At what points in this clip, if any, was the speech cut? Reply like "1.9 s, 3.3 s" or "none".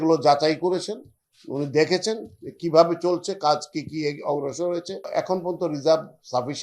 5.1 s